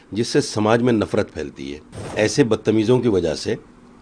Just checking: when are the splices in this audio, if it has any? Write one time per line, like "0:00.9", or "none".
0:02.1